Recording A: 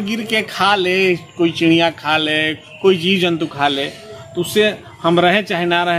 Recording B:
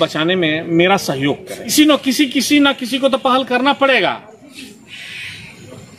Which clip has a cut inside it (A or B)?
B